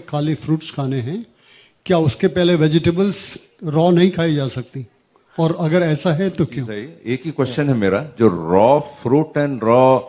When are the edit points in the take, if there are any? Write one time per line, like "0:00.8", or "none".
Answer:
0:06.9